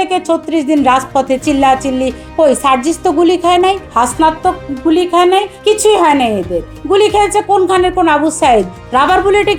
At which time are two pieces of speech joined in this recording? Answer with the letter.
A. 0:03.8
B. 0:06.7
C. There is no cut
C